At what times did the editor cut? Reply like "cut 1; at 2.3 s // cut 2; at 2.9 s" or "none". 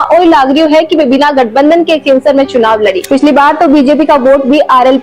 cut 1; at 3.0 s